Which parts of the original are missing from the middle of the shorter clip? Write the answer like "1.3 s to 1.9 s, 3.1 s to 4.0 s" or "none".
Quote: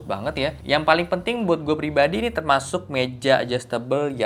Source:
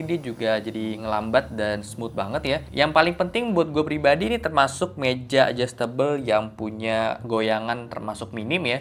none